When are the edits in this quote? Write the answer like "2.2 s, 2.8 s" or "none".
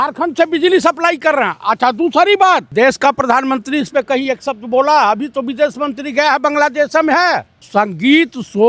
2.7 s, 7.6 s